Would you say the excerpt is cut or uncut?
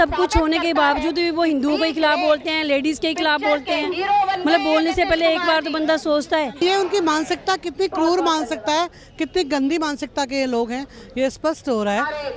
cut